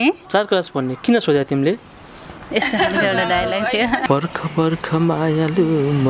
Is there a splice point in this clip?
yes; 1 cut; at 4.0 s

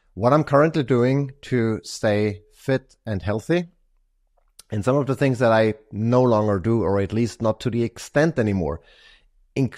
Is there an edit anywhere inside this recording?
no; 0 cuts

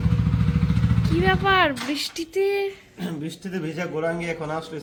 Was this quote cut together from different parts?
no; 0 cuts

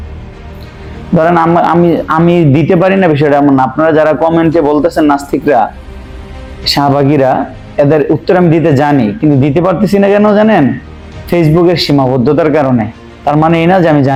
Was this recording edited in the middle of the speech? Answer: no; 0 cuts

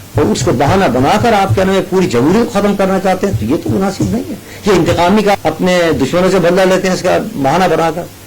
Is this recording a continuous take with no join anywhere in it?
no; 1 cut; at 5.4 s

